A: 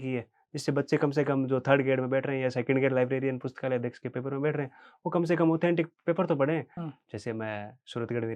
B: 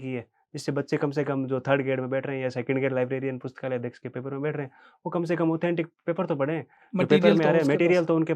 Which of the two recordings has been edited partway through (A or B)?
A